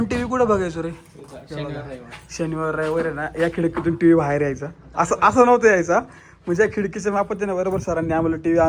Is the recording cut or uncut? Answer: uncut